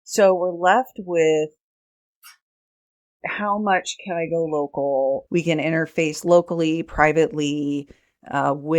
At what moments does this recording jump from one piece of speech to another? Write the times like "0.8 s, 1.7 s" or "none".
5.2 s